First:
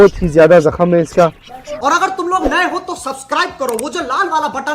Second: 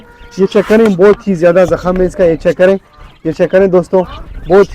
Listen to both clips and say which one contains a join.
first; 1 cut; at 2.0 s

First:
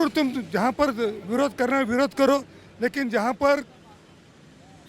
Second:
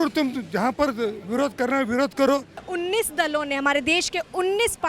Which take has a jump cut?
second; 1 cut; at 2.6 s

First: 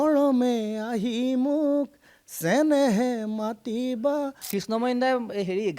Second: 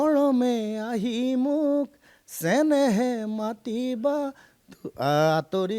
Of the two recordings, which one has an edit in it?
first; 1 cut; at 4.4 s

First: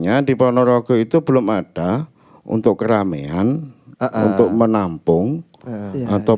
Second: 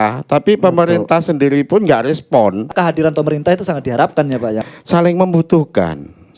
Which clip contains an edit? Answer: second; 2 cuts; at 2.7 s, 4.6 s

